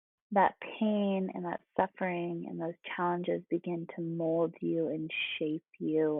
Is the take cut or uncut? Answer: uncut